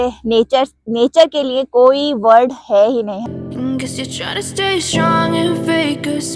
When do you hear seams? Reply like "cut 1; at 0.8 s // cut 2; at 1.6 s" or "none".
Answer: cut 1; at 3.3 s